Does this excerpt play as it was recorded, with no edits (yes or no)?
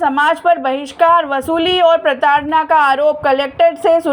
yes